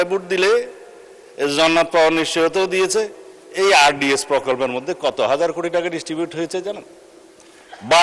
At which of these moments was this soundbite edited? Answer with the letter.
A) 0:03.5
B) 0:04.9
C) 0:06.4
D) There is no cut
D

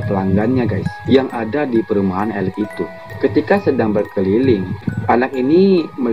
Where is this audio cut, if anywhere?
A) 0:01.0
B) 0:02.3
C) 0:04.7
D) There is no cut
D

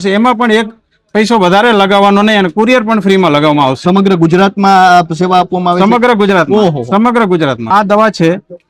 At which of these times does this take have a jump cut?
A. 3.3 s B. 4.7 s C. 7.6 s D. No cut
C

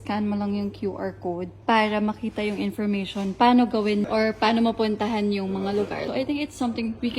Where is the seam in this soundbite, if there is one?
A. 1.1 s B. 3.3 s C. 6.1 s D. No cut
C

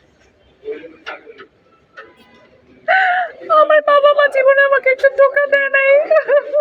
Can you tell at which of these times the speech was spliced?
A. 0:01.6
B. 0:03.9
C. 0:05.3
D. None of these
D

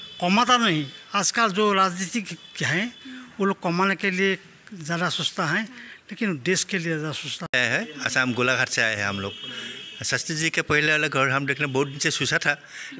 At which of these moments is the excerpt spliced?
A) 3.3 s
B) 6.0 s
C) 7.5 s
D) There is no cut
C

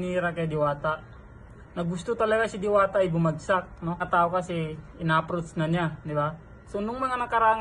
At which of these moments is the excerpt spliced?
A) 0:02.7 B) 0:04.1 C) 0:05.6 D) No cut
B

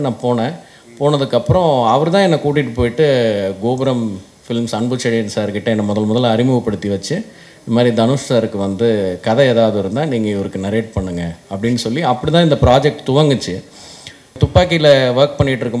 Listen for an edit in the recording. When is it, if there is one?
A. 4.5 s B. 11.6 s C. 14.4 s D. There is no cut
C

